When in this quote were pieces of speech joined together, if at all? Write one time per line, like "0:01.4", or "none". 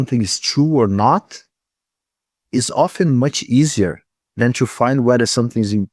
none